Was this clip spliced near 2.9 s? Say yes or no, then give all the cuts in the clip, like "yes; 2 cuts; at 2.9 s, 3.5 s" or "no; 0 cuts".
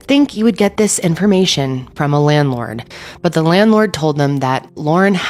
no; 0 cuts